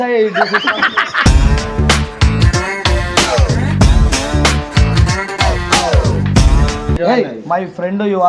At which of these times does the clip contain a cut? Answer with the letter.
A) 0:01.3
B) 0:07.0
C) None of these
B